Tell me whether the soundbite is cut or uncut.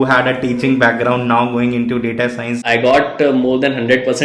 cut